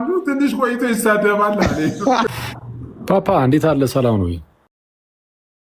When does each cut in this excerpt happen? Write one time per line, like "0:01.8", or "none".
0:02.3